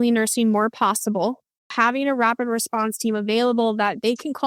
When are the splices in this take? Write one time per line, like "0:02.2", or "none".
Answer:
0:01.7